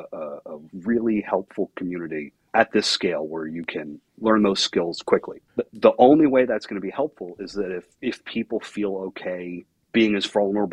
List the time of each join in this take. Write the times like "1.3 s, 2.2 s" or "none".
2.4 s, 4.0 s, 5.4 s, 7.9 s, 9.7 s